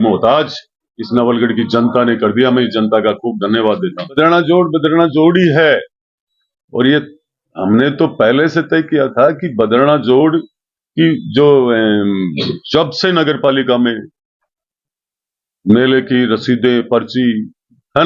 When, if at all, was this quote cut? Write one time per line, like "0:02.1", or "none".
0:04.2